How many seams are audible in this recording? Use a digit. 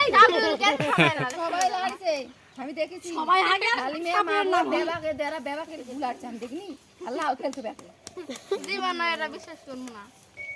0